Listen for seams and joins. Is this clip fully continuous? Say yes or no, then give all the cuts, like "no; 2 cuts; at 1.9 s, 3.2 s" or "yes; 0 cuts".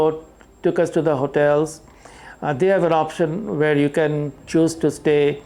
yes; 0 cuts